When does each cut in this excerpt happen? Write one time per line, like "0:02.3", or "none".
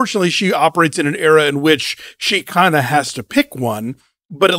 none